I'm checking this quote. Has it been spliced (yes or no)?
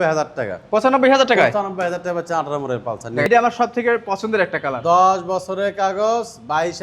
yes